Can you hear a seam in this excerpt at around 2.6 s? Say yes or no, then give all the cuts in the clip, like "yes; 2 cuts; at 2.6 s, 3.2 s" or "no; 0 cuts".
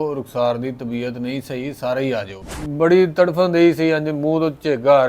yes; 1 cut; at 2.6 s